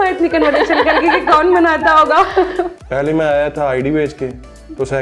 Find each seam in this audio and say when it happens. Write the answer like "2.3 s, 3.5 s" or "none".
2.8 s